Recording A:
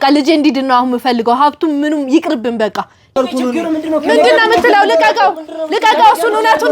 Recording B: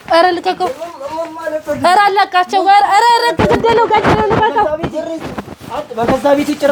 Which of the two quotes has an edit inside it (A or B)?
A